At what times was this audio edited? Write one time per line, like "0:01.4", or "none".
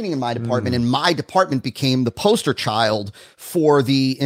none